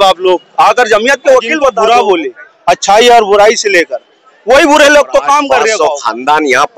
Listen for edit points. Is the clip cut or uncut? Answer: cut